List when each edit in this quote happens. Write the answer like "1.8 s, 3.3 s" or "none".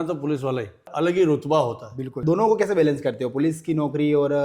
0.9 s, 2.2 s

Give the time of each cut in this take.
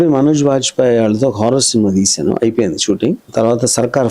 3.2 s

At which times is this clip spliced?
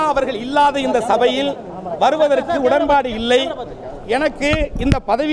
none

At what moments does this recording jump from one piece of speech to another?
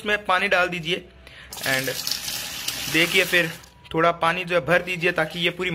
none

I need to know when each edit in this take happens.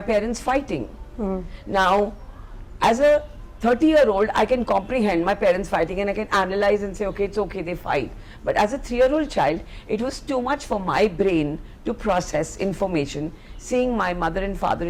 none

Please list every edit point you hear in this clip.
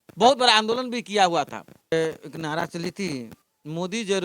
1.9 s

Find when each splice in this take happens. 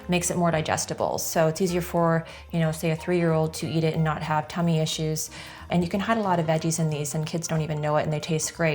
5.7 s

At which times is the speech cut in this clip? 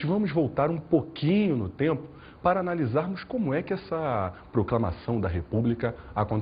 2.8 s

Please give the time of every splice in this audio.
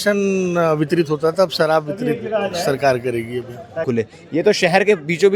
3.9 s

